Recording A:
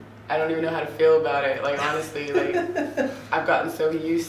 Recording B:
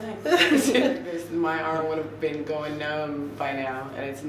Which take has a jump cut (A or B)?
B